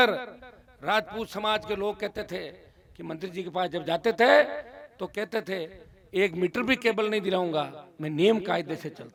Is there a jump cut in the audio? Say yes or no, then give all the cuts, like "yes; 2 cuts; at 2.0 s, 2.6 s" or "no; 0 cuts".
no; 0 cuts